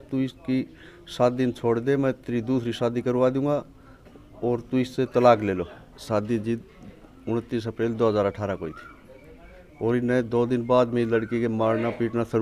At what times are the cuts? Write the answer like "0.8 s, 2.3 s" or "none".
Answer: 6.0 s